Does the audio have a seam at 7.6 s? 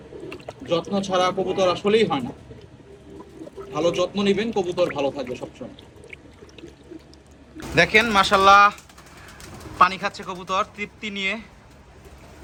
no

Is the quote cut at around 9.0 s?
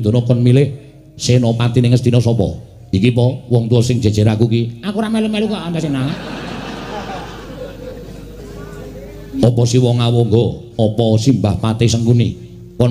no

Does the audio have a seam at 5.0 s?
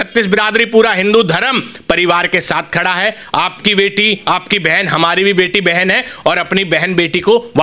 no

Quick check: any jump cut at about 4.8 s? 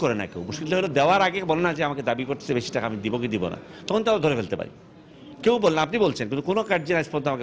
no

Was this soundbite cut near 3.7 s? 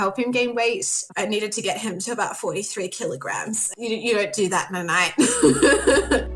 yes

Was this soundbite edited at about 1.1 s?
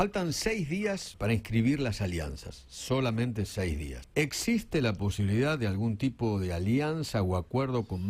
yes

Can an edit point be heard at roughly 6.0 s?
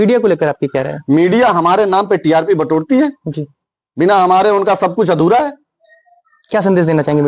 no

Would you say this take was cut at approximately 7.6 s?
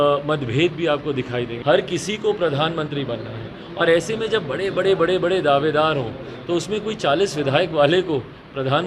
no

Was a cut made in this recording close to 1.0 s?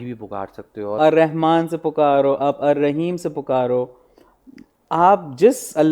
yes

